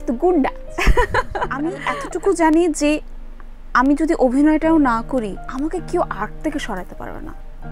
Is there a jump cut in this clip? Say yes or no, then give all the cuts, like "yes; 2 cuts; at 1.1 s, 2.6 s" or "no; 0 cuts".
yes; 2 cuts; at 1.8 s, 5.4 s